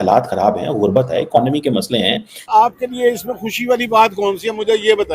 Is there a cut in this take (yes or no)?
yes